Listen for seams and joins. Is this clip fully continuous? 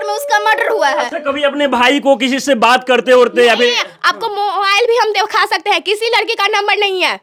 yes; 0 cuts

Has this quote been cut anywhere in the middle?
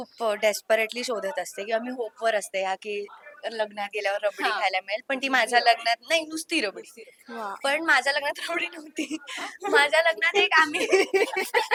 no; 0 cuts

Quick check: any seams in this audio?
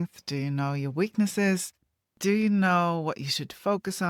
no; 0 cuts

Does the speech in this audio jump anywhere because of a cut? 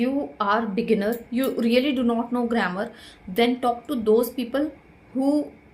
no; 0 cuts

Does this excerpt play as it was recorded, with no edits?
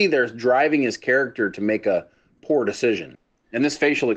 no; 1 cut; at 3.1 s

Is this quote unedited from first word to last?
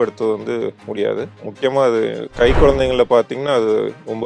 no; 2 cuts; at 1.5 s, 2.2 s

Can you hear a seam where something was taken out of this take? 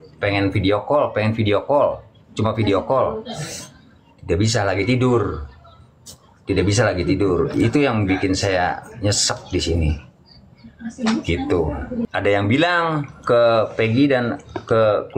yes; 1 cut; at 12.1 s

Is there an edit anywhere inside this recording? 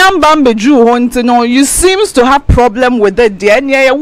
no; 0 cuts

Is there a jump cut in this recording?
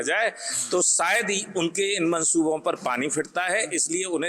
no; 0 cuts

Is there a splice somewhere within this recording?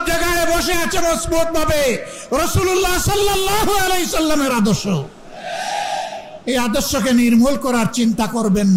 no; 0 cuts

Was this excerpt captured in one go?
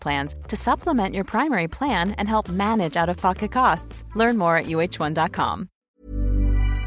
no; 1 cut; at 5.8 s

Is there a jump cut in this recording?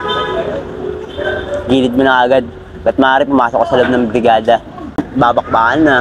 yes; 1 cut; at 5.1 s

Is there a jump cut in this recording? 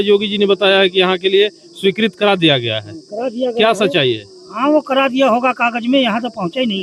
no; 0 cuts

